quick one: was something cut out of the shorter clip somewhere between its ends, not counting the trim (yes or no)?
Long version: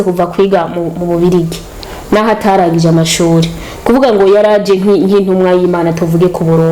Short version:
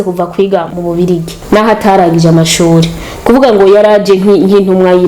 yes